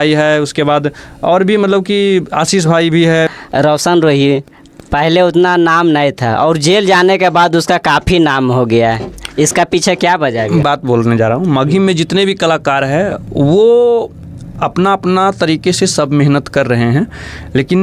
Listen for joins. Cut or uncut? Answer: cut